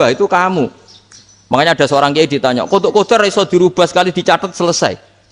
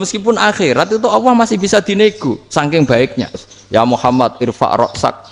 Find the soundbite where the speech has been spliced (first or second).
second